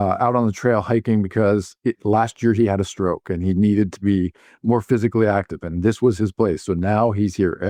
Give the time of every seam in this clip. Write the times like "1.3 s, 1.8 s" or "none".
none